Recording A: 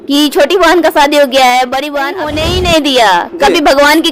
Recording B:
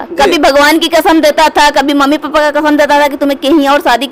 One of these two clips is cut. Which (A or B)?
A